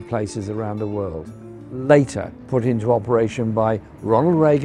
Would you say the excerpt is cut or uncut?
uncut